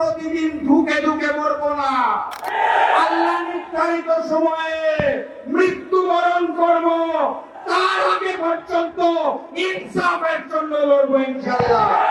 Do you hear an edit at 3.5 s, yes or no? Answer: no